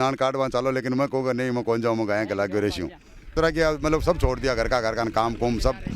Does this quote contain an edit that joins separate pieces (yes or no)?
yes